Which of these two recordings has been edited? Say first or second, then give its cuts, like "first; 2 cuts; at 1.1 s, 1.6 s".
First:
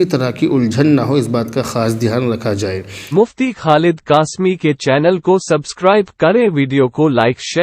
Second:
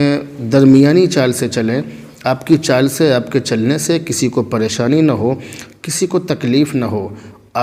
first; 1 cut; at 2.9 s